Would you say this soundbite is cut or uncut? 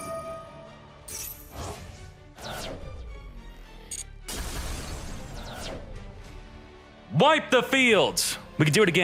uncut